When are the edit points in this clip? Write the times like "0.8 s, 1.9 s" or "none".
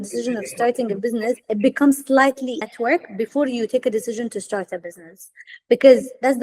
2.7 s